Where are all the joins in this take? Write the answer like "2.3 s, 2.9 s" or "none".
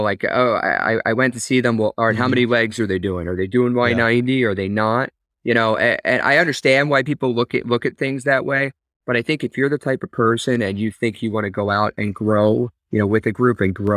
none